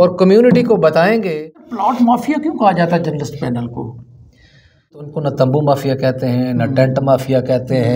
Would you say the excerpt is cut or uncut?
cut